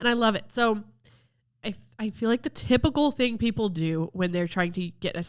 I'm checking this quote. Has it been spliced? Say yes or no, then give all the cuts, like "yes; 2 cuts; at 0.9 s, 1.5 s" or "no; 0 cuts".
no; 0 cuts